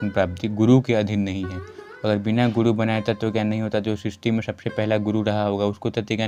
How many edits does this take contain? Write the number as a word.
zero